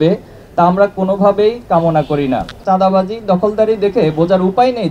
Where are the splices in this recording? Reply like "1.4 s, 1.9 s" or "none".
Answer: 2.5 s